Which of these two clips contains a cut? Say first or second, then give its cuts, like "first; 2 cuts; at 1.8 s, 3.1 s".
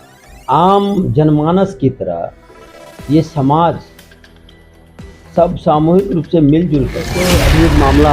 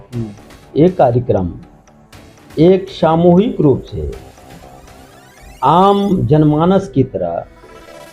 first; 1 cut; at 7.1 s